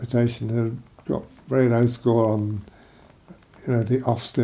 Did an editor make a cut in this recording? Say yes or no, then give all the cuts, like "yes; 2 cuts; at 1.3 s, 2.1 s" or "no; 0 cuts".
no; 0 cuts